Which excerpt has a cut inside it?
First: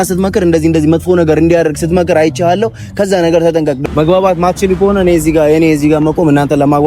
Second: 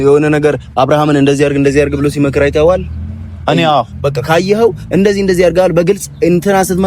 first; 1 cut; at 3.8 s

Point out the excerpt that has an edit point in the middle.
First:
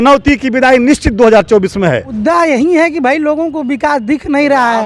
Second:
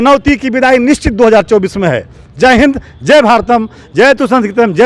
first; 1 cut; at 2.1 s

